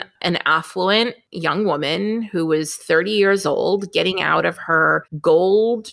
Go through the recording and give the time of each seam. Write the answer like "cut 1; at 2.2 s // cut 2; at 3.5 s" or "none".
cut 1; at 1.3 s // cut 2; at 5.1 s